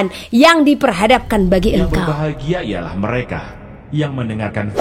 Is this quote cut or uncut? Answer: cut